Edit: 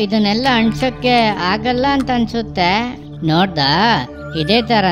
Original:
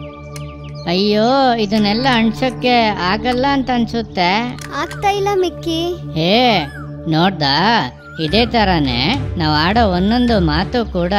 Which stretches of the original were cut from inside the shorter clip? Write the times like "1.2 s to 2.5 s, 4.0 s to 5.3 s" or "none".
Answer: 4.6 s to 6.9 s